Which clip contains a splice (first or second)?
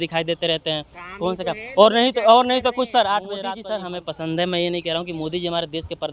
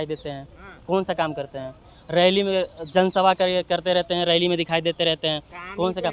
first